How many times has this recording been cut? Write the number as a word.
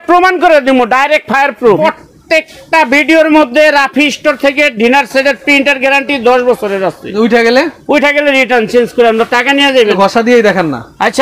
two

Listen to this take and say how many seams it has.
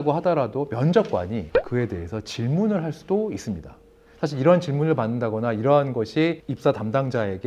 zero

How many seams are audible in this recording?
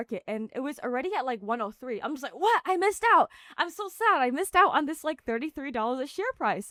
zero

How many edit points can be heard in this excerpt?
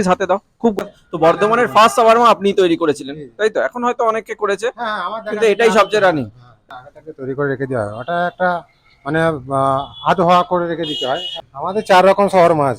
three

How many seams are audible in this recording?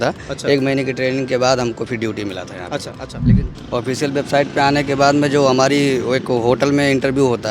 one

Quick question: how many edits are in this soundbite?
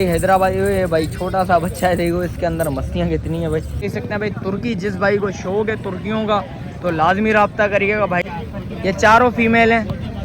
two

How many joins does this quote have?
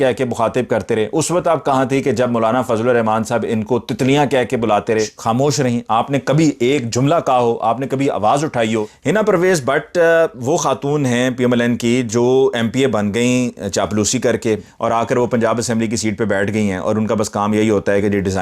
three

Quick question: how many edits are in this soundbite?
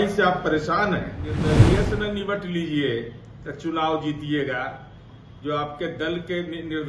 one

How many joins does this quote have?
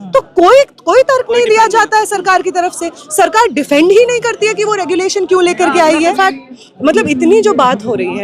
one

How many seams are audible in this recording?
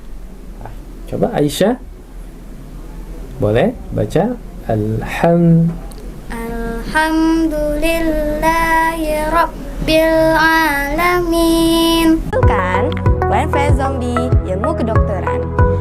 one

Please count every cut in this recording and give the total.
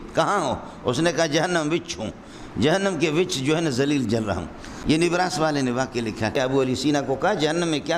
two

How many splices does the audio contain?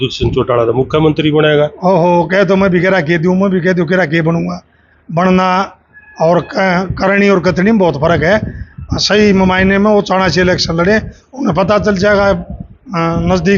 zero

